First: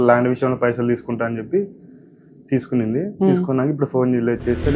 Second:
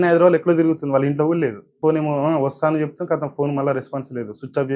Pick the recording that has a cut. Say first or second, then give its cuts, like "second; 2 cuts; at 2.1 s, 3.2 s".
second; 1 cut; at 1.7 s